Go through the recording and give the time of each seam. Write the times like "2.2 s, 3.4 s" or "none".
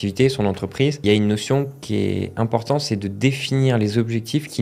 1.0 s